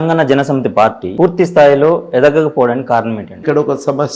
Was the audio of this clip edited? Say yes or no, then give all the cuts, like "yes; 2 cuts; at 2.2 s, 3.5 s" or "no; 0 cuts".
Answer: yes; 2 cuts; at 1.0 s, 3.4 s